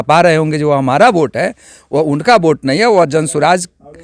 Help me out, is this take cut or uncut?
uncut